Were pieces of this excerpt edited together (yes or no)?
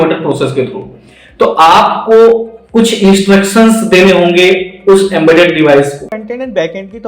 yes